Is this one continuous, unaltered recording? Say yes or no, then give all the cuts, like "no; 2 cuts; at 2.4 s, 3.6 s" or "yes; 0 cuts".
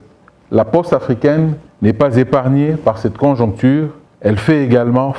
no; 2 cuts; at 1.6 s, 4.0 s